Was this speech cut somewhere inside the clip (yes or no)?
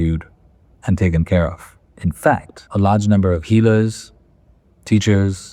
yes